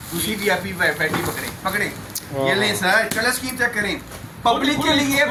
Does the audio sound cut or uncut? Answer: uncut